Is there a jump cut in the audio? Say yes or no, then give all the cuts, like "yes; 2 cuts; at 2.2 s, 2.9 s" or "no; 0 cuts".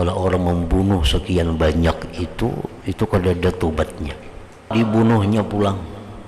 yes; 1 cut; at 4.7 s